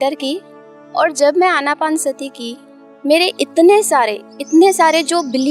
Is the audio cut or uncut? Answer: uncut